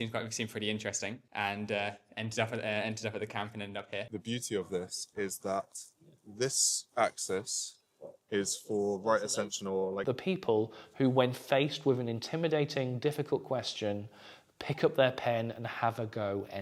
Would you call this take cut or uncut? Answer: cut